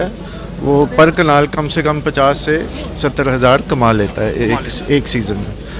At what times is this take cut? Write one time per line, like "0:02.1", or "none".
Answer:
none